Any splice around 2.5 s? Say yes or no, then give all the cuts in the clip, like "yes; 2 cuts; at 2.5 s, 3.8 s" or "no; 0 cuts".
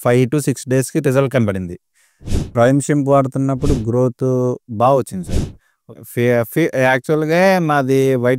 yes; 1 cut; at 2.5 s